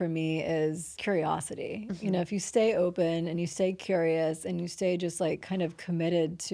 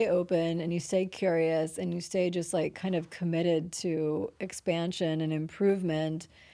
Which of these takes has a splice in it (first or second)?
first